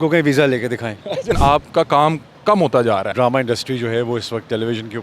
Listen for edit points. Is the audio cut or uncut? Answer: cut